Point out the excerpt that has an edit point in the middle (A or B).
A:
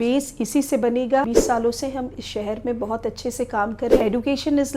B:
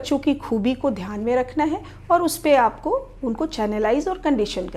A